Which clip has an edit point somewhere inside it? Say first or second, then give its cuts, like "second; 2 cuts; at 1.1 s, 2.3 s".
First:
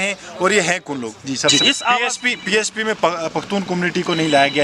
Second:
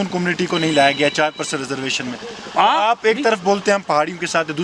first; 1 cut; at 1.5 s